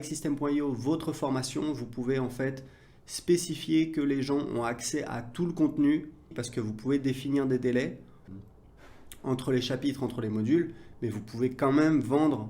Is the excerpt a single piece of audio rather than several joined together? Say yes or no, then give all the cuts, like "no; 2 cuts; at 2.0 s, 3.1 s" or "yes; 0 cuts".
no; 2 cuts; at 6.4 s, 8.2 s